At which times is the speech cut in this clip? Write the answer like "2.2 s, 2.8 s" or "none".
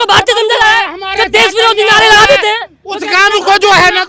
none